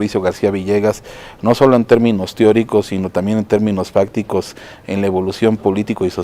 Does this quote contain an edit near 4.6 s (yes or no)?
no